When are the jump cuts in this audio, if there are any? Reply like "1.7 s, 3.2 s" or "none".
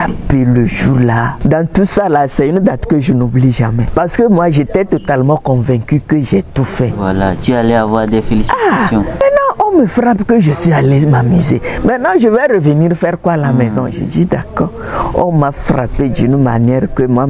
1.3 s, 3.8 s, 9.2 s